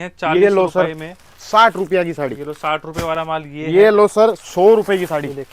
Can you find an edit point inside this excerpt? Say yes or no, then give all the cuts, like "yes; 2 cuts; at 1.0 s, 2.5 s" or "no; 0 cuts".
no; 0 cuts